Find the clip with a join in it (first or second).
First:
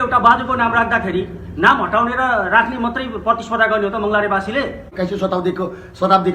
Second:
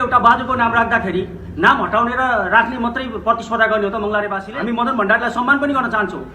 first